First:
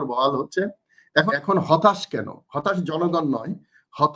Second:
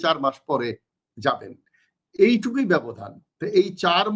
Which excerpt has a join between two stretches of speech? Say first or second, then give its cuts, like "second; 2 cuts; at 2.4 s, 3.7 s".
first; 1 cut; at 1.3 s